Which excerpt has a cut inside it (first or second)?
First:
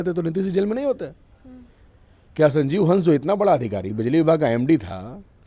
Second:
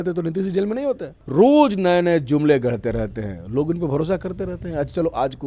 second